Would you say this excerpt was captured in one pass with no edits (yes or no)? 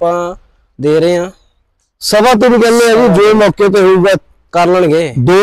yes